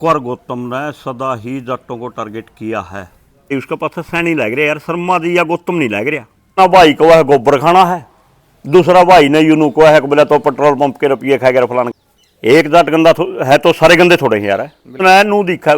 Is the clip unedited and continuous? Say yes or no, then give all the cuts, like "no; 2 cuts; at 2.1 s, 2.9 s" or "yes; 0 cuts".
no; 4 cuts; at 3.5 s, 6.6 s, 11.9 s, 15.0 s